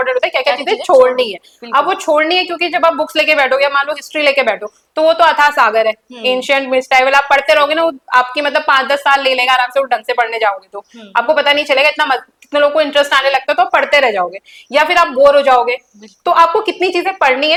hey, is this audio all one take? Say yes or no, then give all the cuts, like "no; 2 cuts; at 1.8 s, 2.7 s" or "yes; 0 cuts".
yes; 0 cuts